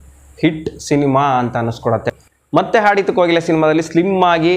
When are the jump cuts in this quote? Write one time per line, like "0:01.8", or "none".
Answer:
0:02.1